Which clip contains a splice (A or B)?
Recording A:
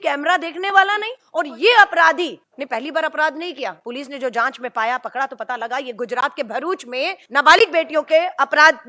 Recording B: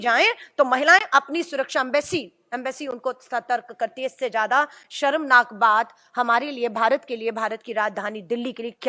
A